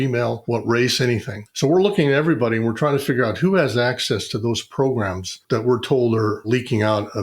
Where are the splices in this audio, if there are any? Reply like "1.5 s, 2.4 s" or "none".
5.4 s